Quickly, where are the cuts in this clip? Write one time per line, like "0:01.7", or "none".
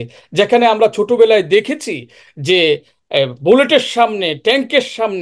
none